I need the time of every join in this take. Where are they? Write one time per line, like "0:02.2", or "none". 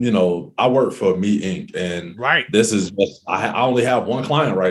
none